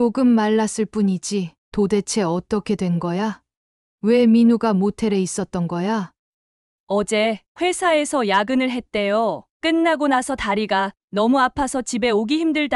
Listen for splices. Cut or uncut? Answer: cut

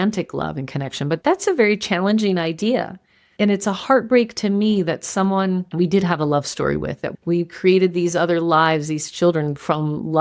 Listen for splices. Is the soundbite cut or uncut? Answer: uncut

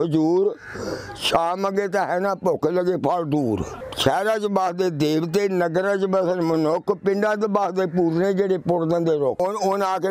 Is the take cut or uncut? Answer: cut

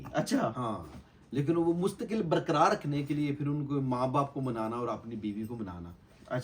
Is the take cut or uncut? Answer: uncut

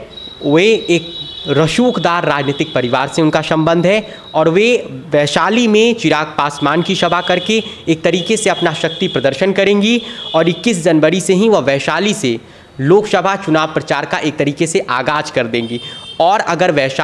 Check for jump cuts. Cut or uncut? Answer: uncut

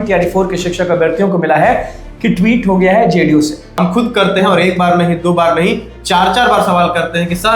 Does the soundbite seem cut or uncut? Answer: cut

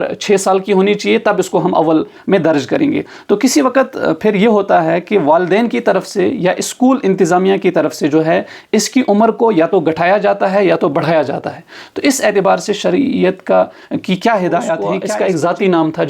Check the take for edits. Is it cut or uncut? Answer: cut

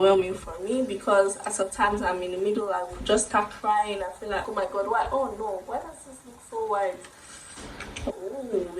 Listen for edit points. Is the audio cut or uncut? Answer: cut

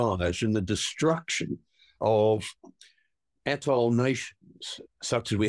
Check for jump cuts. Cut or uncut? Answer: uncut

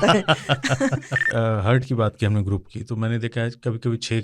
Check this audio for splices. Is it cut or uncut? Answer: cut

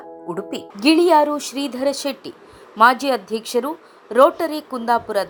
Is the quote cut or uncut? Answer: uncut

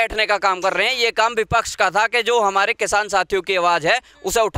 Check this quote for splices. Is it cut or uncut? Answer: uncut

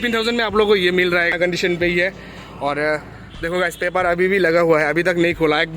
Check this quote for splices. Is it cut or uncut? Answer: cut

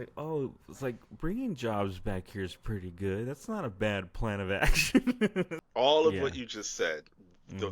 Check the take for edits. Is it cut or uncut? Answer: cut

